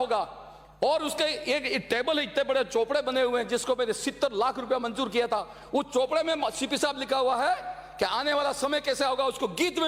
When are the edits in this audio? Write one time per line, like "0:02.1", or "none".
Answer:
none